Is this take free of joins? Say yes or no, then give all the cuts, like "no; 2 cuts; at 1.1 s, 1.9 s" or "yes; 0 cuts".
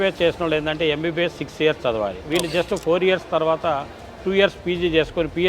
no; 1 cut; at 2.2 s